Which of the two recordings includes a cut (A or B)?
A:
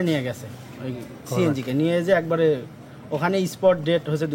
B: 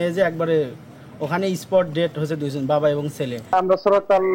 B